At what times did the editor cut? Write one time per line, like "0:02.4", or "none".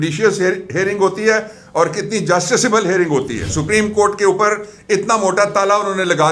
0:03.5